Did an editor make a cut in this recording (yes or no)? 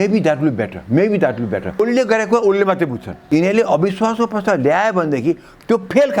yes